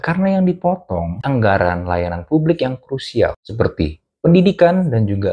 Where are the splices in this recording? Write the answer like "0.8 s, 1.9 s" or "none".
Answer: 1.1 s, 3.4 s